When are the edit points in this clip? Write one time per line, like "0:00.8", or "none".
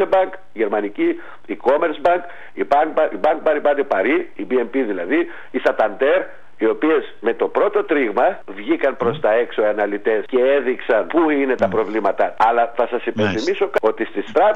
0:04.3
0:06.4
0:08.5
0:10.2
0:11.1
0:12.3
0:13.8